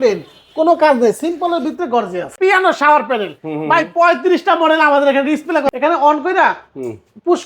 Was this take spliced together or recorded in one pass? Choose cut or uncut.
cut